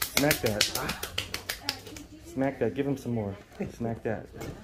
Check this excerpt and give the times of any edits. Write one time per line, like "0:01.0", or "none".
none